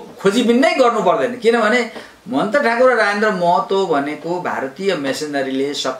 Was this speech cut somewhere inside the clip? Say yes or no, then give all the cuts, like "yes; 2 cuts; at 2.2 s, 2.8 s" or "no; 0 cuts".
no; 0 cuts